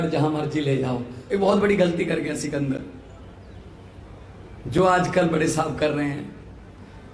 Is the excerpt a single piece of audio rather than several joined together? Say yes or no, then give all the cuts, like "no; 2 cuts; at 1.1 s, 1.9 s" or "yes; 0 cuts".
no; 1 cut; at 1.1 s